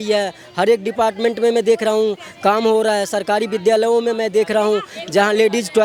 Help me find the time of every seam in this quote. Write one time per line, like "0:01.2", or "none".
none